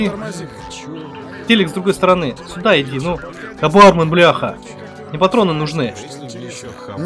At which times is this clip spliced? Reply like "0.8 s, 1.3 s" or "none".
none